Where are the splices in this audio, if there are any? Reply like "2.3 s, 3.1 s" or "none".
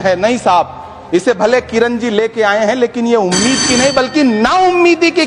none